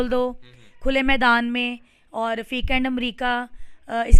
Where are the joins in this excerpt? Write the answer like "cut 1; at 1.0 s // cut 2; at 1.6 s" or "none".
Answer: none